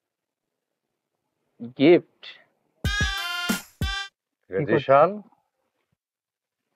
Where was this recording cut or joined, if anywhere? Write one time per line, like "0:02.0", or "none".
0:04.0

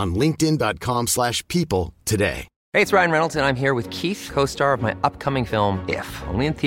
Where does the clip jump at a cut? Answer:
0:02.5

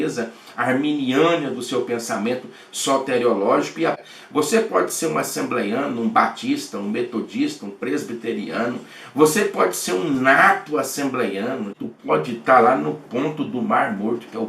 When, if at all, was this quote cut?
0:04.0
0:11.8

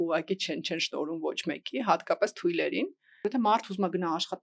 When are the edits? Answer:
0:03.0

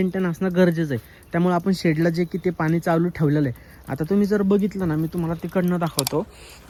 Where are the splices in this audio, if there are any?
none

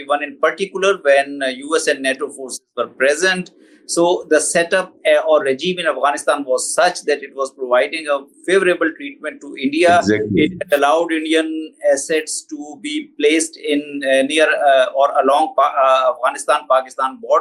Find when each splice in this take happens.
none

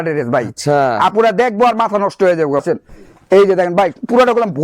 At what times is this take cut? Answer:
0:02.6

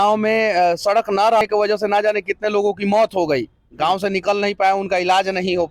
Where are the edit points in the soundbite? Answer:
0:01.4

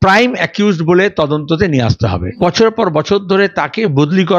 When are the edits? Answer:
0:02.4

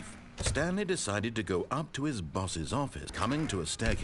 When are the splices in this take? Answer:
0:03.0

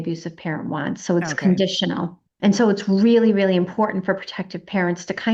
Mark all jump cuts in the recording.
0:02.2

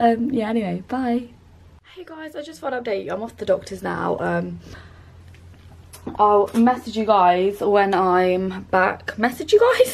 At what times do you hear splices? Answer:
0:03.7

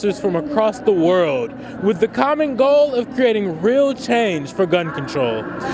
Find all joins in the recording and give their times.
none

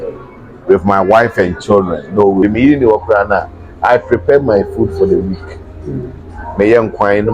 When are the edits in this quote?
0:02.4

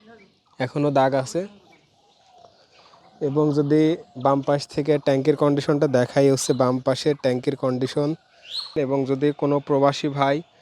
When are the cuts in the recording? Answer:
0:08.8

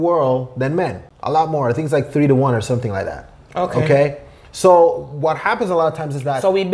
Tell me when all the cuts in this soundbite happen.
0:01.1

